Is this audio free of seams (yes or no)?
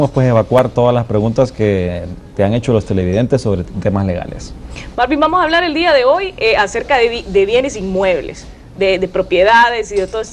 yes